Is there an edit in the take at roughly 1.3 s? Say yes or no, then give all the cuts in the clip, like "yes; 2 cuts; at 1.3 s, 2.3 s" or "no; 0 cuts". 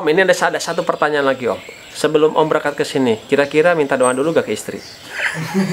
no; 0 cuts